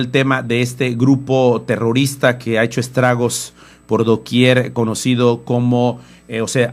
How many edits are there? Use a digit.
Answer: 0